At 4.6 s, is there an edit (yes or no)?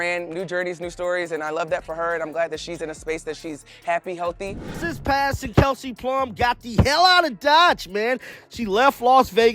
yes